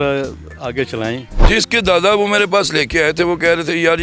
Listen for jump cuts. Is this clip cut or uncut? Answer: cut